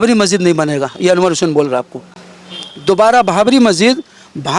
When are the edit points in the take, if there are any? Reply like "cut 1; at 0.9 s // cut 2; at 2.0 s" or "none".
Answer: none